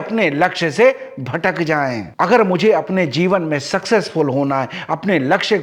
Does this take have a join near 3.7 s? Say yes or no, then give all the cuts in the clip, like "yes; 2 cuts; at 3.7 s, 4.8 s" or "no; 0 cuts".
no; 1 cut; at 2.0 s